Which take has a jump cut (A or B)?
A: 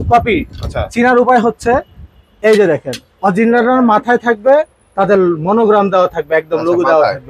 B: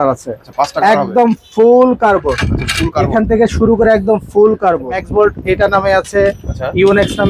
B